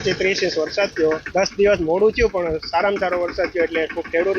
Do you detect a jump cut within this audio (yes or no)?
yes